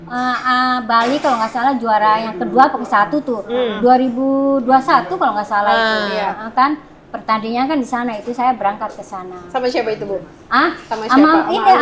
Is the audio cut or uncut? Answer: uncut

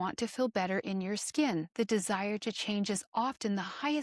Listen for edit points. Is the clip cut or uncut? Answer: cut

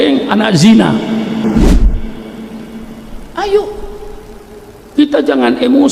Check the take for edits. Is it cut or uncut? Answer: uncut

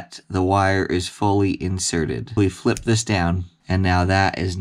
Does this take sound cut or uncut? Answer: cut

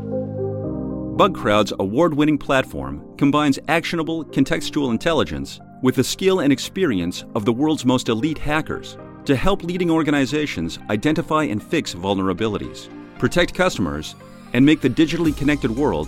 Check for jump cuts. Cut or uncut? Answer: cut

